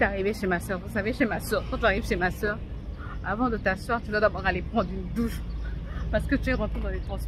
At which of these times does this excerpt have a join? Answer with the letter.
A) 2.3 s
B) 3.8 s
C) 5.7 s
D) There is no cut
D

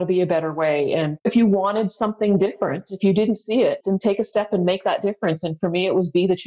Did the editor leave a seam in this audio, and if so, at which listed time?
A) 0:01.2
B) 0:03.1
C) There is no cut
A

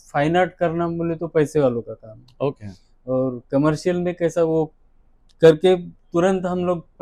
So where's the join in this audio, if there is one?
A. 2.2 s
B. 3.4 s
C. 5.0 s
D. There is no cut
D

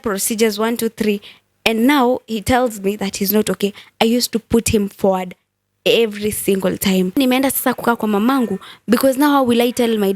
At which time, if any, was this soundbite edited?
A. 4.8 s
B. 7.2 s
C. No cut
B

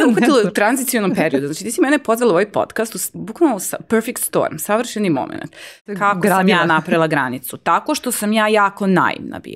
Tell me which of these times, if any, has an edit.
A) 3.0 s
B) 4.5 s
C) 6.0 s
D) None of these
C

